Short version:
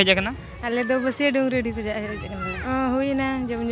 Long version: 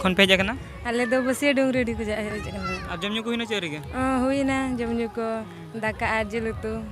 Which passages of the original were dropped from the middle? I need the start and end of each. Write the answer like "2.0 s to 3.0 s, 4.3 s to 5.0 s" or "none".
2.7 s to 3.8 s